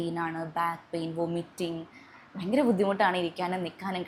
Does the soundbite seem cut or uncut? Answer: uncut